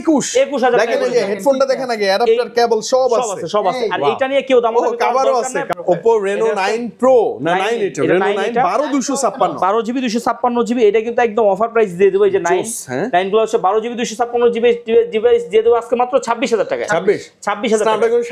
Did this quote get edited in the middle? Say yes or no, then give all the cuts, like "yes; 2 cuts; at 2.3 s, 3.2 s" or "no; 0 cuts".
no; 0 cuts